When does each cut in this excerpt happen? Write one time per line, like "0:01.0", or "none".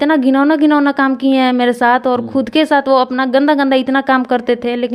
none